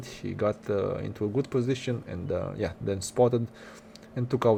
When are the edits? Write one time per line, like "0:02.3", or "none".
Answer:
none

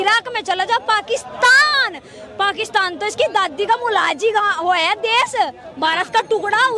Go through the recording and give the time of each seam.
none

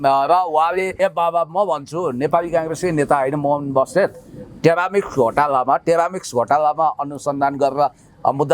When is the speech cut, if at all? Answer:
0:00.9

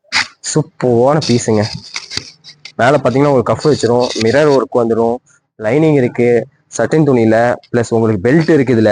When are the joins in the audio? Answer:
none

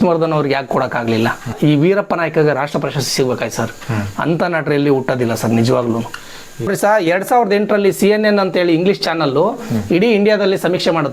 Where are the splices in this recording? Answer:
0:01.5
0:06.7

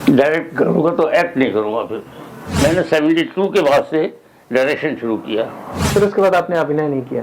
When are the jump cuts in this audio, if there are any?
0:02.6
0:05.8

